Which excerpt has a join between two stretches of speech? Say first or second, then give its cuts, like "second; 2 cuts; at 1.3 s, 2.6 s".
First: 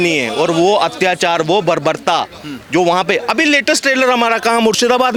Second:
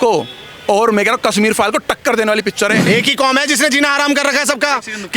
second; 1 cut; at 2.9 s